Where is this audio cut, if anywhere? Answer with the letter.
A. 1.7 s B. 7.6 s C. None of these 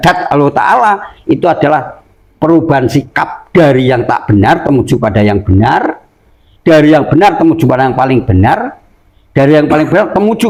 C